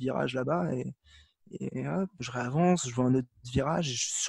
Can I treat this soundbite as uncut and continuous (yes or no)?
yes